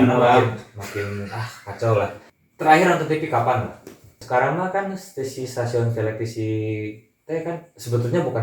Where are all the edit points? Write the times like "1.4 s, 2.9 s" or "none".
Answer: 4.2 s